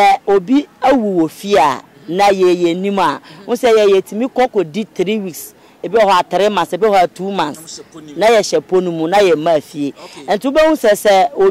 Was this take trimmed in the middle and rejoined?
no; 0 cuts

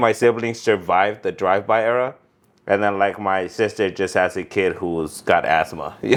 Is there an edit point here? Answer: no; 0 cuts

